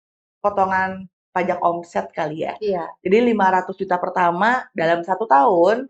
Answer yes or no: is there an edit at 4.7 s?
no